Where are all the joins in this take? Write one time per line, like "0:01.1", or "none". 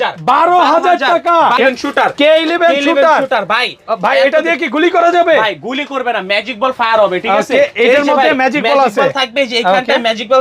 0:01.6